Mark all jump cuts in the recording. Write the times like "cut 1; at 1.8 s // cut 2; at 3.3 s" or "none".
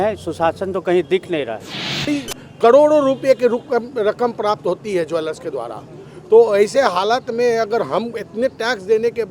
cut 1; at 2.1 s